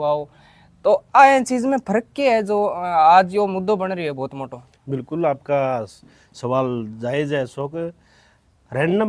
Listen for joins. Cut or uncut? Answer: uncut